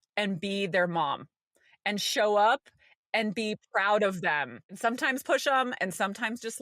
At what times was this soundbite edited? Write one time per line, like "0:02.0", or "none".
0:04.7